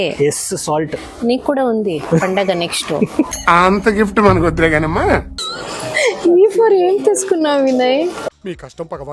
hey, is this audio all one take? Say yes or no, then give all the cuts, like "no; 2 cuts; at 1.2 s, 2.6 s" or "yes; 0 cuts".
no; 1 cut; at 5.3 s